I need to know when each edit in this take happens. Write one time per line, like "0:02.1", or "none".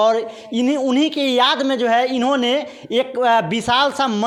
none